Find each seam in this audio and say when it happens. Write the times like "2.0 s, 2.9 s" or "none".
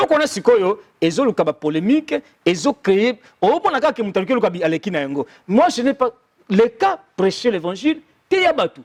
none